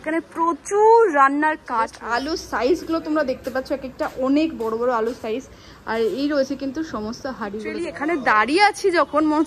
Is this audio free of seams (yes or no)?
no